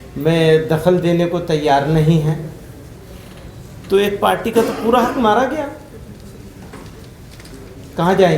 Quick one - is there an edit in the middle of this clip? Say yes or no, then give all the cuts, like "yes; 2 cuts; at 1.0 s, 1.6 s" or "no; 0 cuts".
no; 0 cuts